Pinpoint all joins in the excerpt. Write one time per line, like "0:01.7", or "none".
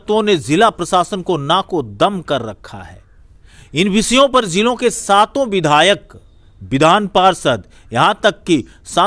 none

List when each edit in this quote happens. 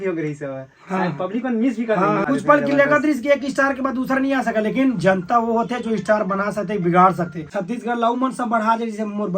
0:02.2
0:07.6

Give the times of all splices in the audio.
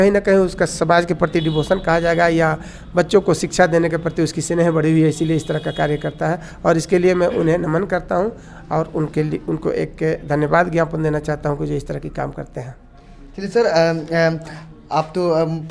none

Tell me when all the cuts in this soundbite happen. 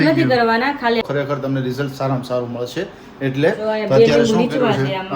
0:01.0

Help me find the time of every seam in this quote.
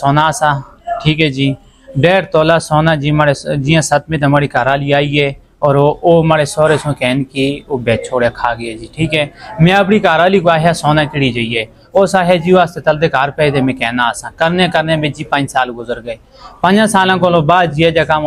none

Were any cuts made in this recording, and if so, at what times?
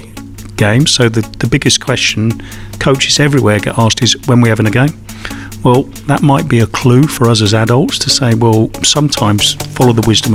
none

